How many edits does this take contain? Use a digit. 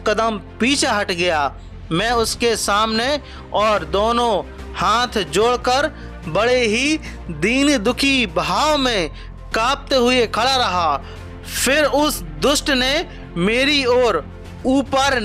0